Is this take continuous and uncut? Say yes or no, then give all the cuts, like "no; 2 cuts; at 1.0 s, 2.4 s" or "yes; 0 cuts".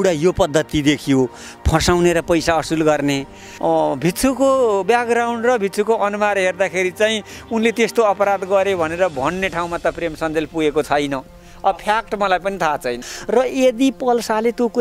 no; 2 cuts; at 3.5 s, 13.0 s